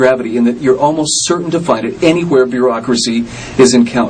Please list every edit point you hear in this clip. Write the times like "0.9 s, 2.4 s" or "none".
1.4 s